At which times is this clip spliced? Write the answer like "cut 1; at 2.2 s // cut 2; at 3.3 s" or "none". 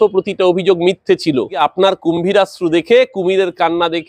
cut 1; at 1.6 s